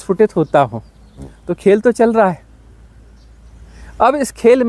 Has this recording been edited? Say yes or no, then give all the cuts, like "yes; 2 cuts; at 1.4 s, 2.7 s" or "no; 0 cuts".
no; 0 cuts